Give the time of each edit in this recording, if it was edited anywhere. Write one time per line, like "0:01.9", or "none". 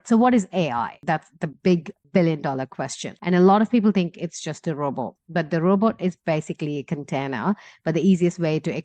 0:01.0
0:03.1